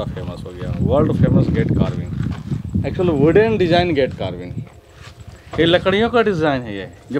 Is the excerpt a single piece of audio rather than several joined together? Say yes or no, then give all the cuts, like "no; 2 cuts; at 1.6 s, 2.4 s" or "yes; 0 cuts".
yes; 0 cuts